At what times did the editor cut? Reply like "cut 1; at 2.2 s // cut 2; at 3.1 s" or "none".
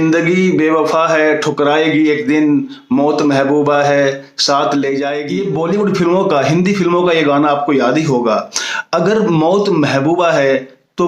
cut 1; at 5.3 s